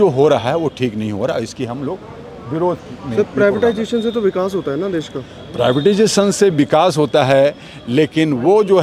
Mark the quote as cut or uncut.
uncut